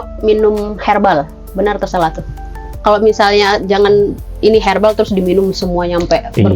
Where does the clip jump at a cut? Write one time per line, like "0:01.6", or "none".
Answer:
0:02.7